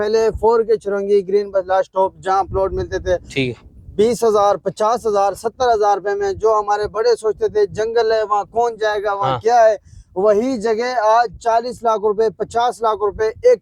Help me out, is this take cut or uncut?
uncut